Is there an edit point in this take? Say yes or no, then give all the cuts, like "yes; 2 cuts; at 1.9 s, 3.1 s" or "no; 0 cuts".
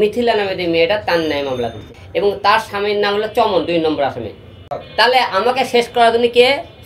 yes; 2 cuts; at 1.9 s, 4.6 s